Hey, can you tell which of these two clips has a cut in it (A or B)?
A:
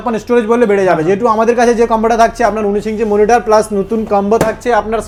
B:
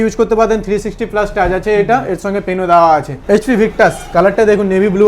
B